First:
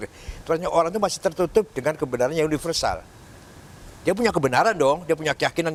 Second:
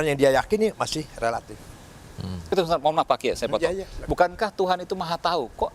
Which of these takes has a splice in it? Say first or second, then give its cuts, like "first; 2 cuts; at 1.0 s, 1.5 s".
second; 1 cut; at 2.5 s